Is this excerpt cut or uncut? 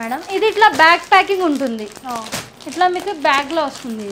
uncut